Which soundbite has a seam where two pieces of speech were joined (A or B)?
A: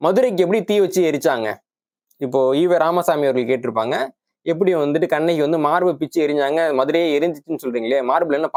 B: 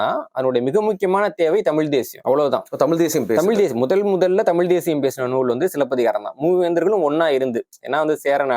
B